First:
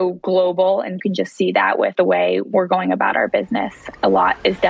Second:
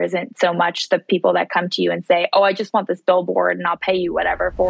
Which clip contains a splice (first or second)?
first